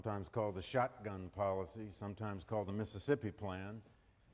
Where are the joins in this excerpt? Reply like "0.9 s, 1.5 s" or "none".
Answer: none